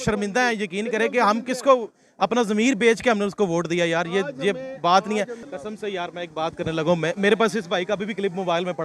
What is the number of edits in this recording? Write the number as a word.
one